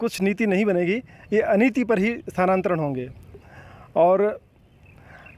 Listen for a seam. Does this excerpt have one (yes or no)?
no